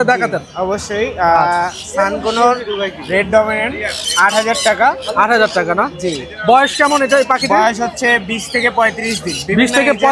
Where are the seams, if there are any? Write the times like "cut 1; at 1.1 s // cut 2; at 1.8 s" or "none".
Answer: none